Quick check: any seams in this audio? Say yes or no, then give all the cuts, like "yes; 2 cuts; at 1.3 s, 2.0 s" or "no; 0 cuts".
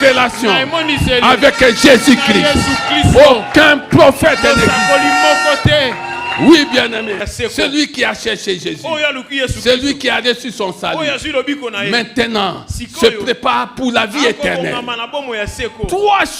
yes; 1 cut; at 7.2 s